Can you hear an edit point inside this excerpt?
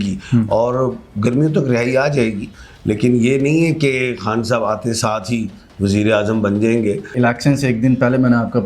yes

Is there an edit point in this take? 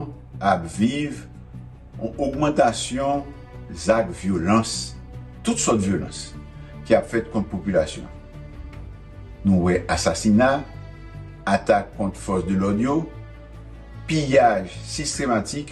yes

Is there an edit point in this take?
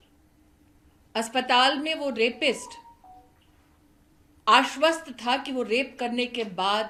no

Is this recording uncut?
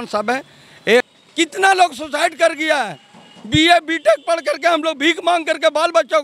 no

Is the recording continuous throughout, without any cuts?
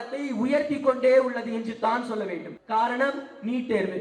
no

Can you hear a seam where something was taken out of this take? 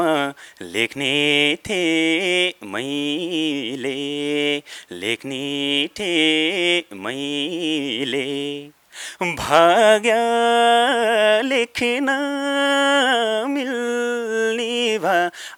no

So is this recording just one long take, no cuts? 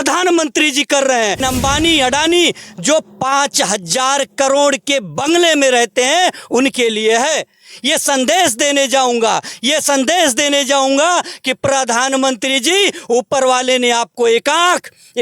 no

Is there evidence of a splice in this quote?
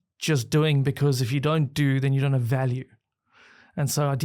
no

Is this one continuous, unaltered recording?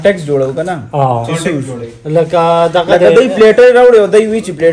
yes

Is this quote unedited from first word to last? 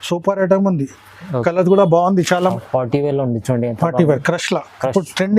no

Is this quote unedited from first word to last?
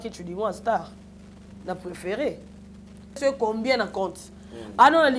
no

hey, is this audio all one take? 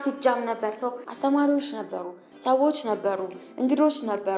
no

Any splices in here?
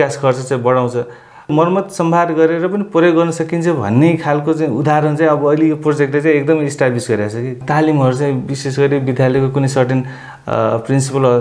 yes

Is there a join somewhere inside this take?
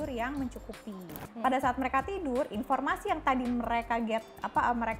yes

